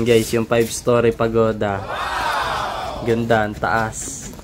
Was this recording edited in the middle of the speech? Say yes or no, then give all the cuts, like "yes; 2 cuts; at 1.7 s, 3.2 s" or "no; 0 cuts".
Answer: no; 0 cuts